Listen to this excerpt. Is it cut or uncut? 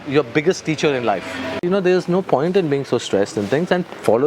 cut